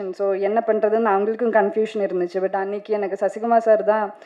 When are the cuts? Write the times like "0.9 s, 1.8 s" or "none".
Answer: none